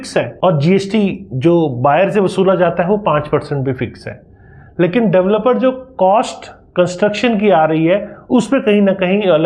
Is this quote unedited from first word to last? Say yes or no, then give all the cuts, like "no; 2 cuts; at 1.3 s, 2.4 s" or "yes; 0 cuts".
yes; 0 cuts